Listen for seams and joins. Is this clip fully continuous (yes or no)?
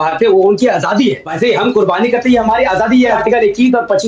no